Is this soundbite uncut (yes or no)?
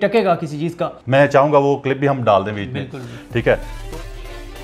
no